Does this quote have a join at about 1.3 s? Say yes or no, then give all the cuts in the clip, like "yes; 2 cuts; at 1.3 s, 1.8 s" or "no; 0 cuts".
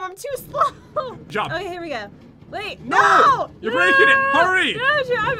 yes; 1 cut; at 1.3 s